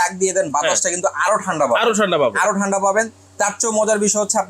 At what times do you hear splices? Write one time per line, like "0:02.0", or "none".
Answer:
none